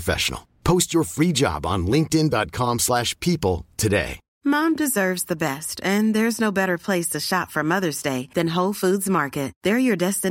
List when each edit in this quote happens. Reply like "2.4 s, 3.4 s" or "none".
4.2 s